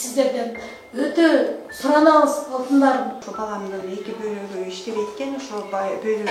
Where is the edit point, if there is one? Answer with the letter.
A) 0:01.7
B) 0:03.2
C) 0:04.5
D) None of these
B